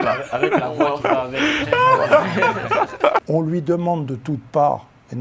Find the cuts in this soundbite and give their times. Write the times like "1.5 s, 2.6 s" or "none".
3.2 s